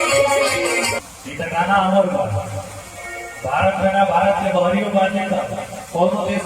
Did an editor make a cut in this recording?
yes; 1 cut; at 1.0 s

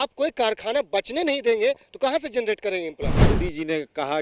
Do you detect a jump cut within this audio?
yes; 1 cut; at 3.2 s

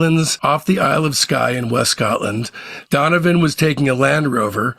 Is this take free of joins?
no; 1 cut; at 2.7 s

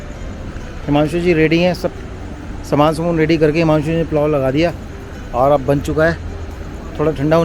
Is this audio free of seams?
yes; 0 cuts

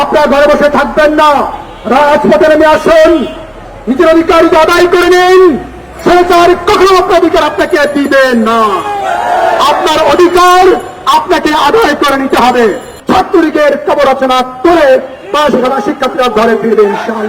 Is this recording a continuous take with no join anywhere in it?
no; 1 cut; at 12.9 s

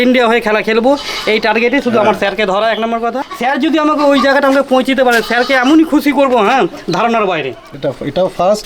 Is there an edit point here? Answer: yes; 2 cuts; at 3.3 s, 7.6 s

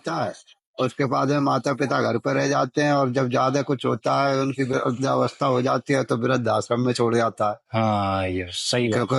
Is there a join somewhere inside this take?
no; 0 cuts

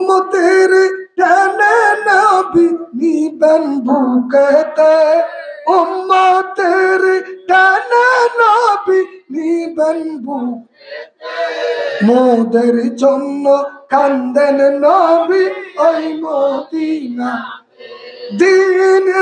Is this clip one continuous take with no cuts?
yes; 0 cuts

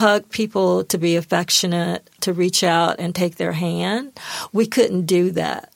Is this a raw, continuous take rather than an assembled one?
no; 1 cut; at 2.1 s

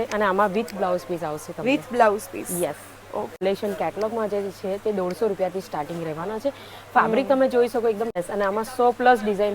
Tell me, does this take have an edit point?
yes; 2 cuts; at 3.4 s, 8.2 s

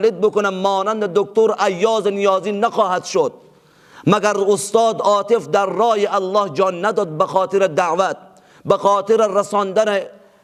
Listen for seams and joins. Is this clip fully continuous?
yes; 0 cuts

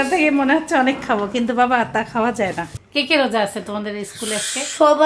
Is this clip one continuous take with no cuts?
no; 1 cut; at 2.8 s

